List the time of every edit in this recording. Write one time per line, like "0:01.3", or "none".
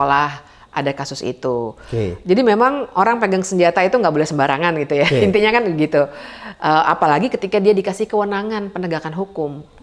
none